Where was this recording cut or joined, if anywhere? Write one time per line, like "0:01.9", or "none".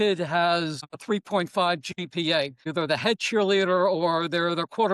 0:00.9
0:02.6